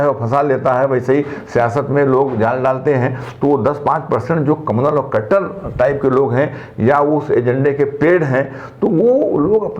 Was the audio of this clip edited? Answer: no; 0 cuts

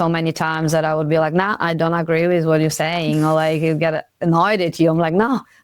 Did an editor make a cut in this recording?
no; 0 cuts

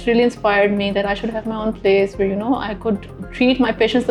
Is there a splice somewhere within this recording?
no; 0 cuts

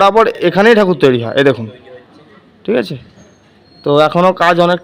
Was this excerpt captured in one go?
yes; 0 cuts

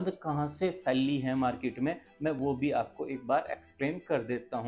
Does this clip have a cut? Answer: no; 0 cuts

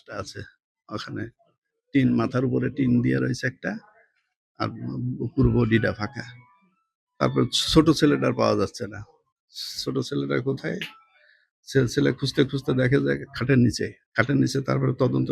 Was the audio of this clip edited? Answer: yes; 1 cut; at 14.0 s

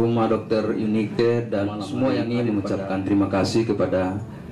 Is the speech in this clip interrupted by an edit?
yes; 1 cut; at 2.2 s

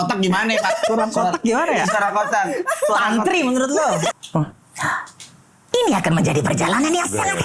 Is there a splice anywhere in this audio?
yes; 1 cut; at 4.1 s

